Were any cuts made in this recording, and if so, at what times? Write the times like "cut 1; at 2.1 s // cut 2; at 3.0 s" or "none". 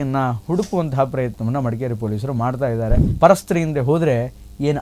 cut 1; at 3.0 s